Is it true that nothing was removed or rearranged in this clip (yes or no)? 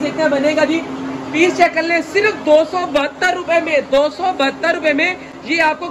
yes